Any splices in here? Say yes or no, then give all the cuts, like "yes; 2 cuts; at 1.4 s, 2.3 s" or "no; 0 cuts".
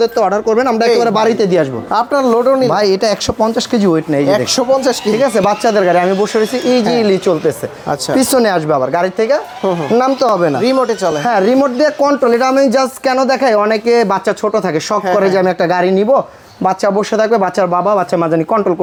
no; 0 cuts